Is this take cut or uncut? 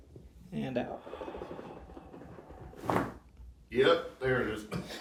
uncut